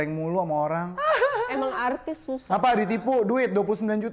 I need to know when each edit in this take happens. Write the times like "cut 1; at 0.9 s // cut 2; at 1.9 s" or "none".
none

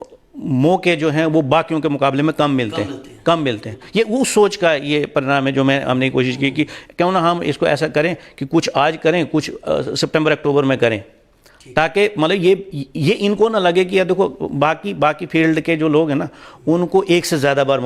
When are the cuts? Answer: none

